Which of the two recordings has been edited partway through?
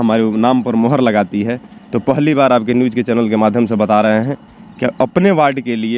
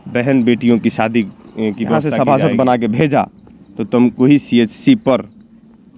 second; 1 cut; at 2.0 s

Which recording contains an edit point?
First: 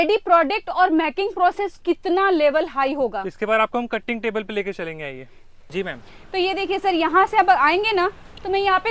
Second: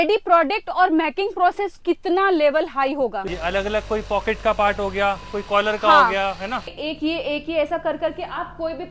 second; 2 cuts; at 3.3 s, 6.8 s

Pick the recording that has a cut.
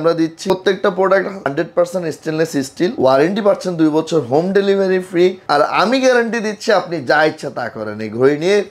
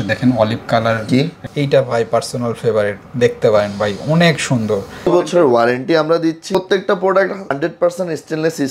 second; 2 cuts; at 1.4 s, 5.1 s

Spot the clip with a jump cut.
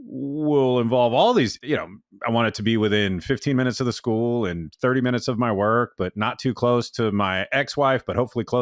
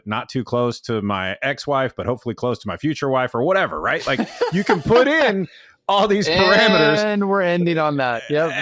first; 2 cuts; at 1.6 s, 4.6 s

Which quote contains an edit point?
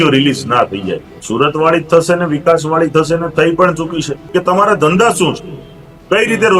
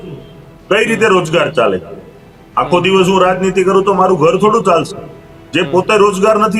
first; 2 cuts; at 1.1 s, 4.2 s

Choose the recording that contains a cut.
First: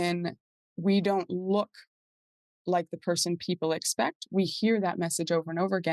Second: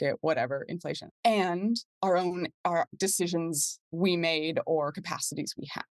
second; 3 cuts; at 1.1 s, 1.9 s, 2.9 s

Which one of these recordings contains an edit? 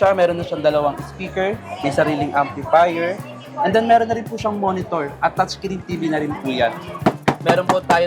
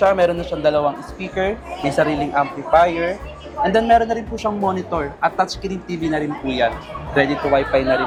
first; 1 cut; at 6.9 s

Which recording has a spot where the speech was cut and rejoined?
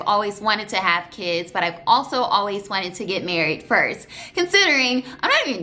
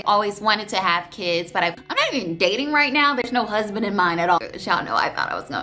second; 2 cuts; at 1.8 s, 4.4 s

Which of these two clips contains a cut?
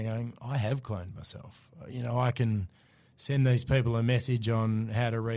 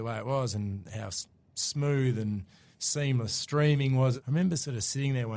second; 1 cut; at 4.2 s

